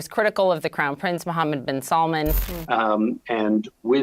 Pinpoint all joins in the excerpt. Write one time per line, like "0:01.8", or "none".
0:02.5